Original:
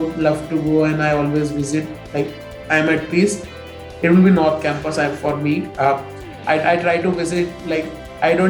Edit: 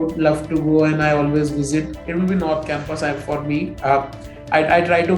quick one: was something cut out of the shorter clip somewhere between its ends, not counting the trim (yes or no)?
yes